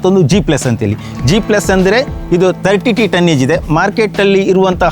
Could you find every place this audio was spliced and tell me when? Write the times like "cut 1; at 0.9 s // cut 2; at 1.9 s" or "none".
none